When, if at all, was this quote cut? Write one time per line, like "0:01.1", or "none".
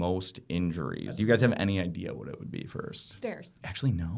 0:01.1
0:03.1